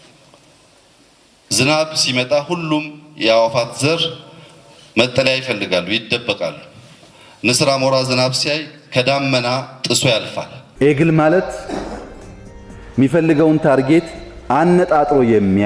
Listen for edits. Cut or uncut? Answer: cut